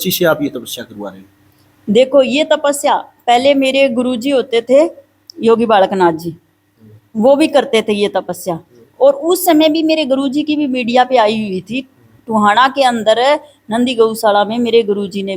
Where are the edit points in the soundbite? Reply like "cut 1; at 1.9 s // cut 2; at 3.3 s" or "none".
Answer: none